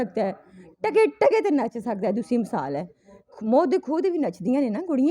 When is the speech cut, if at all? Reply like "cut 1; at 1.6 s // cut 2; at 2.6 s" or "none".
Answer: none